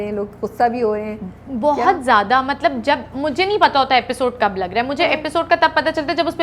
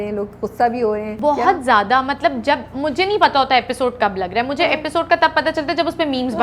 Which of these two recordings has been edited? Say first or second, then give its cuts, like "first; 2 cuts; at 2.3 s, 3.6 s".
second; 1 cut; at 1.1 s